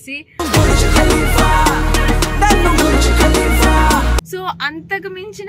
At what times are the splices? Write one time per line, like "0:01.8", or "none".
0:04.3